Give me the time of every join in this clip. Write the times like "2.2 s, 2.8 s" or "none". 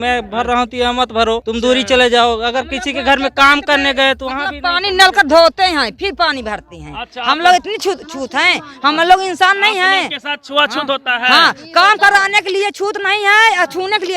1.5 s